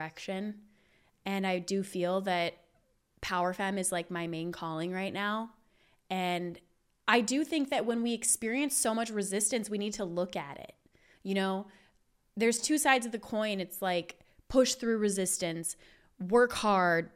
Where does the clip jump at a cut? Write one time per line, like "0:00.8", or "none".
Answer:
none